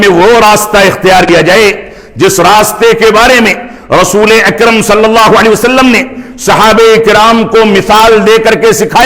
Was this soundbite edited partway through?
yes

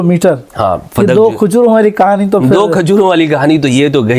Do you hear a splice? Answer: no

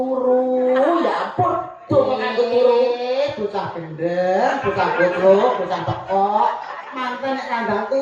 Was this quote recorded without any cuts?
yes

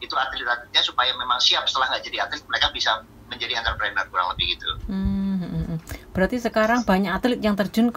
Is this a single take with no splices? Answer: yes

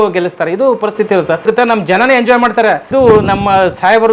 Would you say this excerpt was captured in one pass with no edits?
no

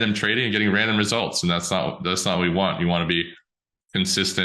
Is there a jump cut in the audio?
no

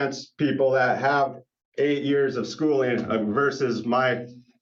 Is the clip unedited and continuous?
yes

